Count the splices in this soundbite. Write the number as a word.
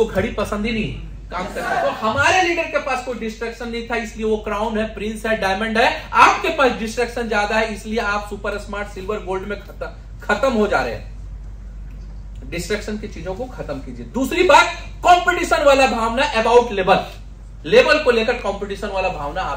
one